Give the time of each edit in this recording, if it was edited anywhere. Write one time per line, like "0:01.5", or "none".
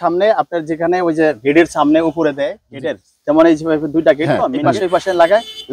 0:02.6
0:04.5